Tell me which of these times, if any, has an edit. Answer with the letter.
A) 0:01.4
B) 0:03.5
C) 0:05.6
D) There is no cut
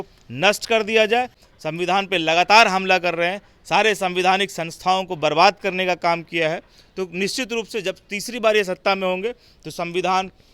A